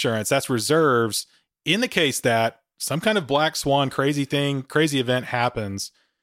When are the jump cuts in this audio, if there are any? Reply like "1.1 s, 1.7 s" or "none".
none